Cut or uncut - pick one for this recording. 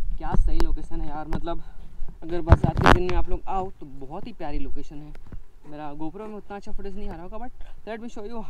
uncut